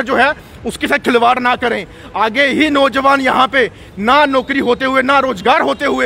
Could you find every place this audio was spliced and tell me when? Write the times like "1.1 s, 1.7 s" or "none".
none